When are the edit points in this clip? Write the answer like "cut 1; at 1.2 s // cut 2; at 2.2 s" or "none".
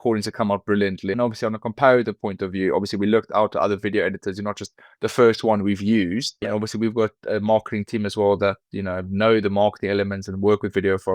cut 1; at 1.1 s // cut 2; at 6.4 s